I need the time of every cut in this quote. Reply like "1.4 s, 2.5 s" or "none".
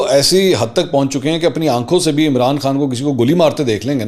none